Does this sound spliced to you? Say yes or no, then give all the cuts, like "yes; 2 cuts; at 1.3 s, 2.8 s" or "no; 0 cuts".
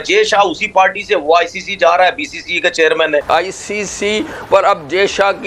no; 0 cuts